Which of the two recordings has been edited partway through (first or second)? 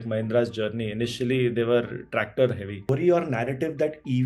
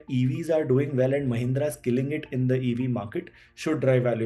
first